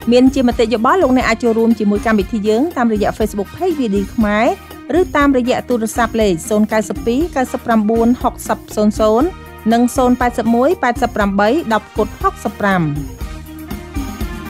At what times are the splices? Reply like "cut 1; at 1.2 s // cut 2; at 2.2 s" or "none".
cut 1; at 13.0 s